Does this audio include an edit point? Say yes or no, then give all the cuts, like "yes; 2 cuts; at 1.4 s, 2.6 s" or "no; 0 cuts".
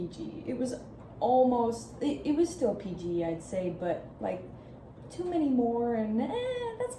no; 0 cuts